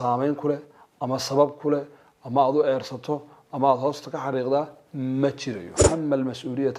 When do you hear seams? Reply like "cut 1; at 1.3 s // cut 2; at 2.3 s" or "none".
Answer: cut 1; at 5.8 s